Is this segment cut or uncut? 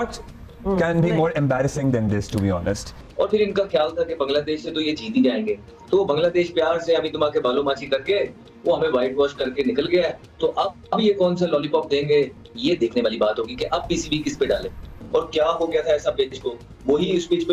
uncut